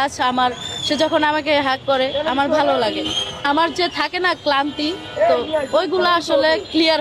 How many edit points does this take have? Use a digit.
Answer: 1